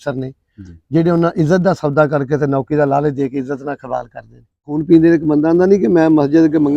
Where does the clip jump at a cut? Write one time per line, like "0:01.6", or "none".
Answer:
0:04.7